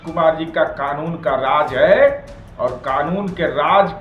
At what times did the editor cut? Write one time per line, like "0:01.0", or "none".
none

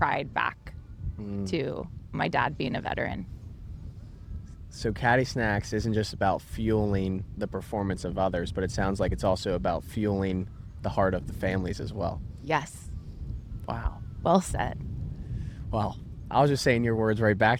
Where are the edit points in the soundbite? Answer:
none

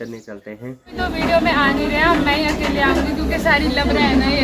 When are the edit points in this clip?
0:00.9

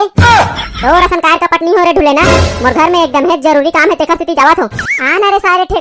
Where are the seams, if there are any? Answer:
0:04.8

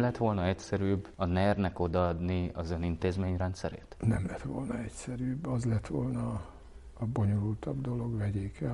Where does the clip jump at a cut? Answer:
none

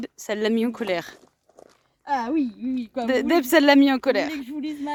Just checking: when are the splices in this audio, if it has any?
none

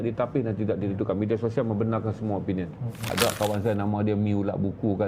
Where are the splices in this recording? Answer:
0:03.1

